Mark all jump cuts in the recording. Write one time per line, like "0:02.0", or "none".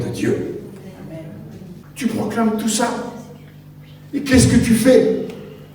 0:01.8